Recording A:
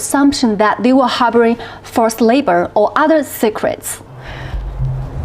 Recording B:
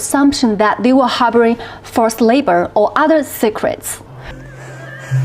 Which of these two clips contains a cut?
B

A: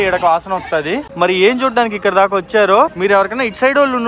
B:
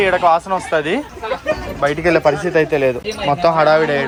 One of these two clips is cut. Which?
A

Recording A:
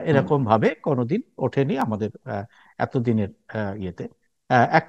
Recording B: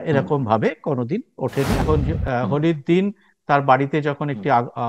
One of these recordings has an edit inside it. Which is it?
B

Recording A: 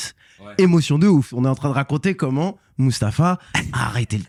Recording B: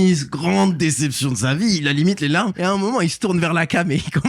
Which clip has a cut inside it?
B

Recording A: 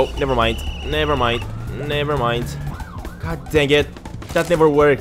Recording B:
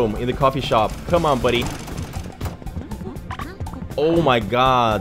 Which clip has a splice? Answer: A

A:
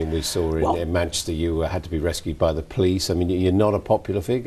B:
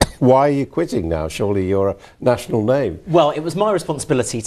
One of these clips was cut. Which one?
A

